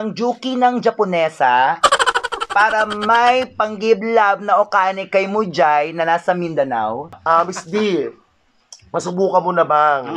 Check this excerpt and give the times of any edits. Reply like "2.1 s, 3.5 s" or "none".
7.2 s